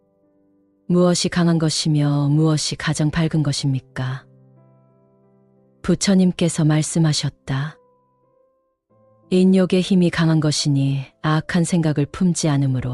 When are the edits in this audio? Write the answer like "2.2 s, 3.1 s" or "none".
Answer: 4.2 s, 5.8 s

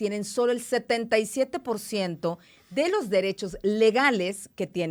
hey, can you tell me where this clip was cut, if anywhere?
none

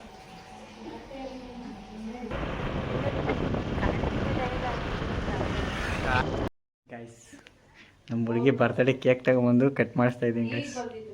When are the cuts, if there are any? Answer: 2.3 s, 6.2 s

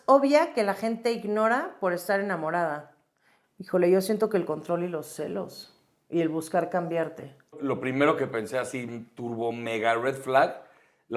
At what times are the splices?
7.6 s

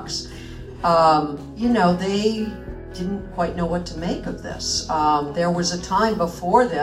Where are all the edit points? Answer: 1.4 s

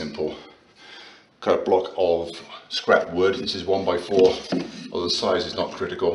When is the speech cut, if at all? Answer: none

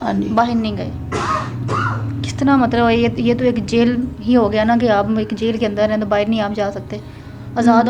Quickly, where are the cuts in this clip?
none

